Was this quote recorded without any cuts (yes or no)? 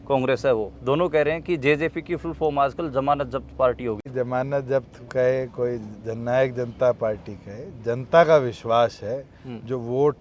no